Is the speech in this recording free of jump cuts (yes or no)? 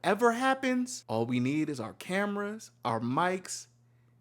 no